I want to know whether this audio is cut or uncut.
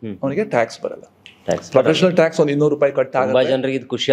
uncut